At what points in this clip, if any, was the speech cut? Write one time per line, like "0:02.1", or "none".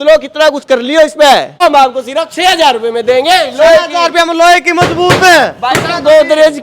0:01.6